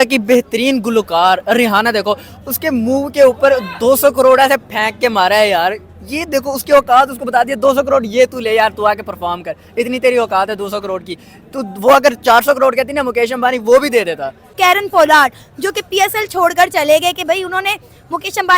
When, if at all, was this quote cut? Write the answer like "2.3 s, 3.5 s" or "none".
14.5 s